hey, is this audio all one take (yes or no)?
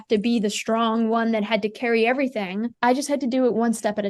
no